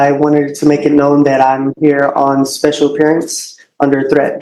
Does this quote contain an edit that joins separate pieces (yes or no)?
no